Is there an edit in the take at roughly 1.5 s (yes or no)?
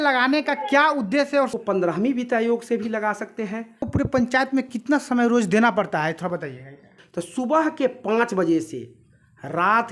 yes